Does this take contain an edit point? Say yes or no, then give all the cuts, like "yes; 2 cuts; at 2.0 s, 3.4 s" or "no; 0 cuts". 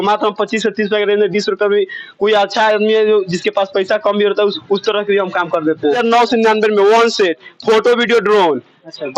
yes; 1 cut; at 6.0 s